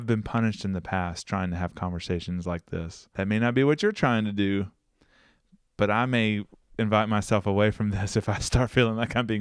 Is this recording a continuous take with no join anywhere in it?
no; 1 cut; at 3.0 s

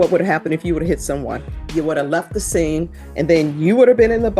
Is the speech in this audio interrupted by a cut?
yes; 2 cuts; at 1.6 s, 3.0 s

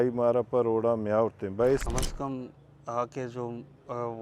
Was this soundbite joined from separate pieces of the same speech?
yes; 1 cut; at 1.9 s

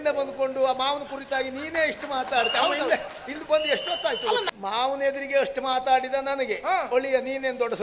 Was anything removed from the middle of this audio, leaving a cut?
yes; 1 cut; at 4.5 s

